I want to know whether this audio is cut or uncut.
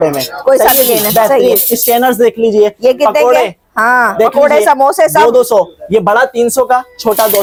uncut